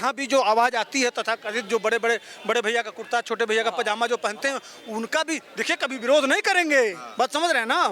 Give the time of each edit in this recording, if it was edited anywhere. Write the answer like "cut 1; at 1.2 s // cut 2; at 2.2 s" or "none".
none